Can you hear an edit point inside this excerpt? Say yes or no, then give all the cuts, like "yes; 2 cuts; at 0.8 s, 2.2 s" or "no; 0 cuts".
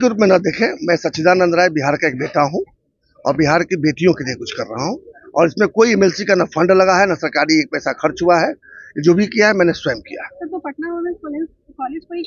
no; 0 cuts